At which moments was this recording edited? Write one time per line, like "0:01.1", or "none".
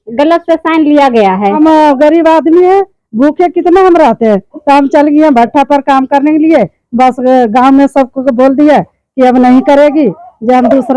0:01.6

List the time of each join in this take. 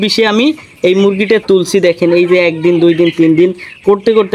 none

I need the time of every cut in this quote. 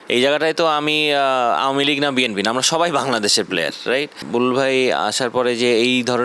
0:04.2

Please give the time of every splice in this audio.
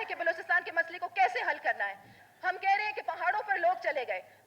0:02.2

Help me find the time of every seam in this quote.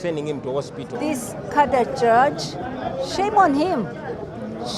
0:00.9

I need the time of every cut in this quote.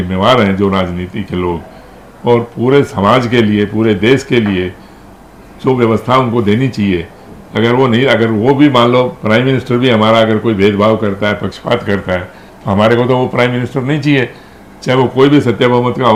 none

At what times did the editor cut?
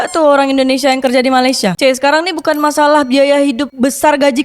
0:01.7

